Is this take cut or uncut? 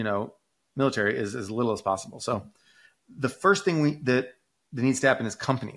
uncut